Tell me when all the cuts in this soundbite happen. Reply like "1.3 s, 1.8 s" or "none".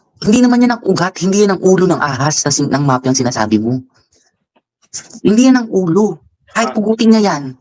none